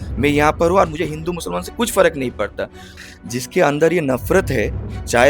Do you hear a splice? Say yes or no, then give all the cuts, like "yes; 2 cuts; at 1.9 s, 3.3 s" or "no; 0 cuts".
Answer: yes; 1 cut; at 2.9 s